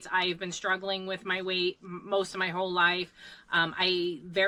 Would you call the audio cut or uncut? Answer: uncut